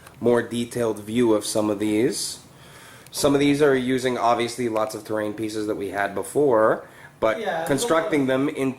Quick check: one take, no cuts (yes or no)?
no